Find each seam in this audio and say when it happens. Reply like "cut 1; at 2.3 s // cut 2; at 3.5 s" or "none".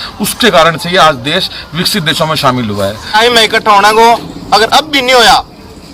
cut 1; at 3.2 s

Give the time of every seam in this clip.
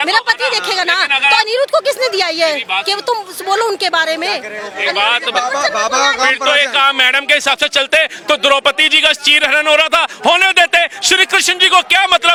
none

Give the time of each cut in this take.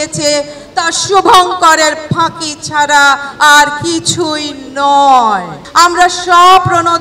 cut 1; at 5.6 s

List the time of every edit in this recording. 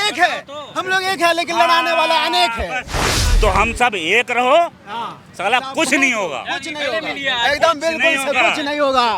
cut 1; at 3.2 s

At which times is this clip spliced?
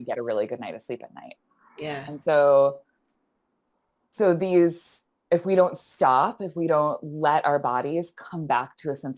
none

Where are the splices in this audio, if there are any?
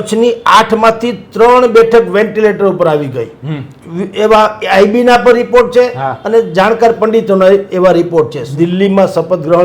cut 1; at 8.4 s

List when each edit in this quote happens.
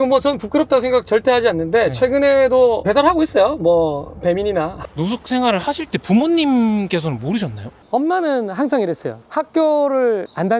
cut 1; at 4.8 s // cut 2; at 7.7 s // cut 3; at 9.2 s

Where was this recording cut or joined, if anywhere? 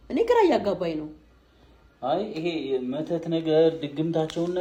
none

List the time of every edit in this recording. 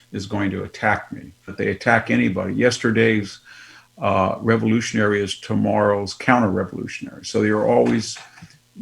cut 1; at 1.5 s

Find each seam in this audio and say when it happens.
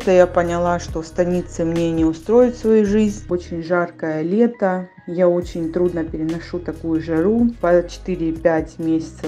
cut 1; at 3.3 s // cut 2; at 7.6 s

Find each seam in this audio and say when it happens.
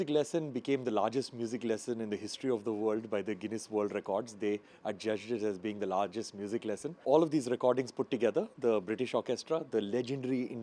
cut 1; at 7.0 s

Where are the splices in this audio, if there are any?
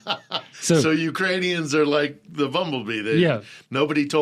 none

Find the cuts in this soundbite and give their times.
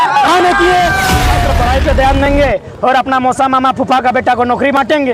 cut 1; at 1.3 s

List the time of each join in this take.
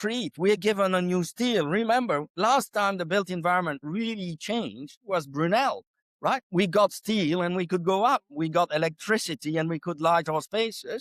none

